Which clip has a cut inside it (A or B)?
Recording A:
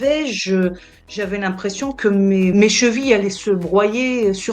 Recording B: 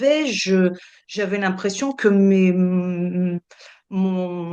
A